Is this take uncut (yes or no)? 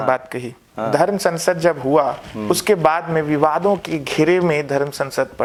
yes